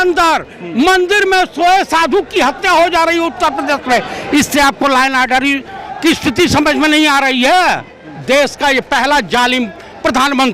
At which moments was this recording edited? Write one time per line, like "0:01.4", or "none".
0:08.0